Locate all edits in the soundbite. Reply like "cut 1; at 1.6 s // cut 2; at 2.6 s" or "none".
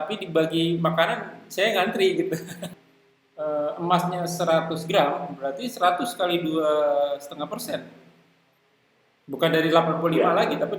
cut 1; at 2.6 s